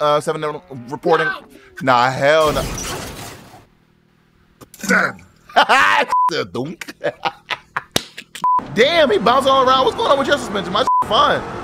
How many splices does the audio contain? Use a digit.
1